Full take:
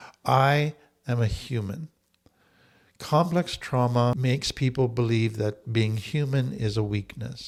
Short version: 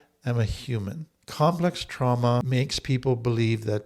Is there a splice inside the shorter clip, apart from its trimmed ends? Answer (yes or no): yes